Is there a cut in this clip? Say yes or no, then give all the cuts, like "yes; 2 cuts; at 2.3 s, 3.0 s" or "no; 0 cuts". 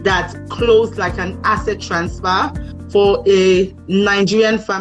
no; 0 cuts